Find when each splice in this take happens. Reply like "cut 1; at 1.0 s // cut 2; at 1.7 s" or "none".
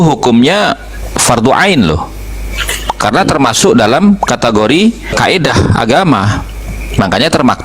cut 1; at 5.2 s